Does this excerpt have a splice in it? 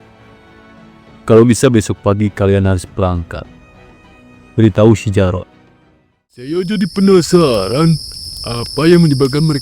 yes; 1 cut; at 6.5 s

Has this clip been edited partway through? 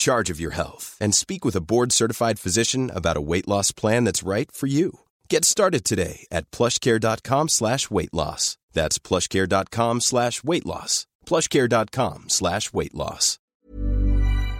yes; 1 cut; at 13.6 s

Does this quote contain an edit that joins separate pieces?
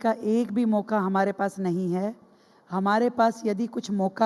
no; 0 cuts

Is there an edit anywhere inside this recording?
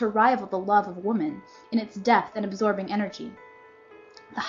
yes; 1 cut; at 1.5 s

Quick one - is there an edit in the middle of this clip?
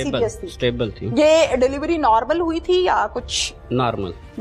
no; 0 cuts

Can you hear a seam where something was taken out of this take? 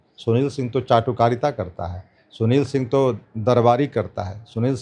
no; 0 cuts

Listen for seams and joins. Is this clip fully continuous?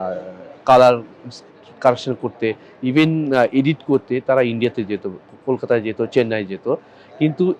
yes; 0 cuts

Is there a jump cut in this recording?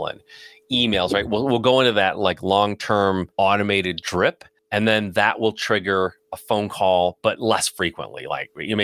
yes; 2 cuts; at 3.3 s, 4.5 s

